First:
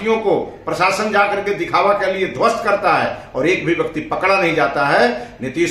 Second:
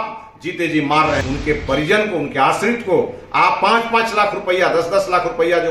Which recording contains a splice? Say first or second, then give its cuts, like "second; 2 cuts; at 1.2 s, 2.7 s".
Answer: second; 1 cut; at 1.2 s